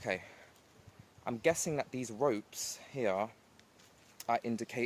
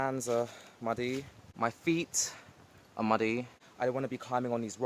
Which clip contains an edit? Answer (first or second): second